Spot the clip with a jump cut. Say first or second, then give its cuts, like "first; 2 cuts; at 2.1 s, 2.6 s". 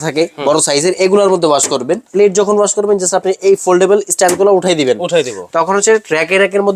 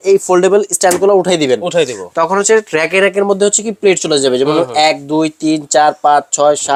first; 1 cut; at 2.1 s